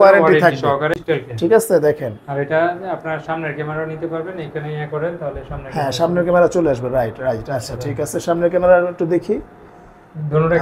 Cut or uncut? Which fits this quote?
cut